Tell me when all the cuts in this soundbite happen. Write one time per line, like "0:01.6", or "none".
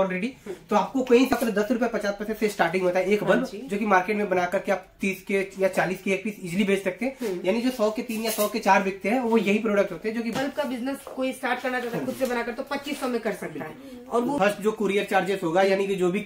0:01.3
0:10.4
0:14.4